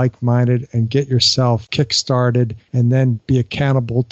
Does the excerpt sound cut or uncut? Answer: cut